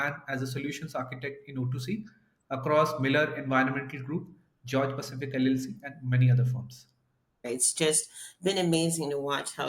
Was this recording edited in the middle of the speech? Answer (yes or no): yes